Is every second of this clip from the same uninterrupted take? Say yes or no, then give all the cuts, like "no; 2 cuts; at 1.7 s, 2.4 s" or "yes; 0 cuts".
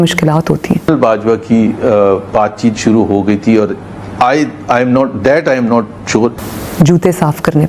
no; 2 cuts; at 0.9 s, 6.5 s